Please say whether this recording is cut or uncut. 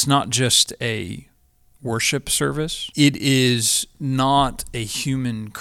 cut